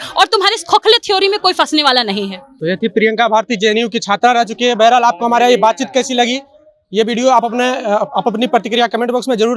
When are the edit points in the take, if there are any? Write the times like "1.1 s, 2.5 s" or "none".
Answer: none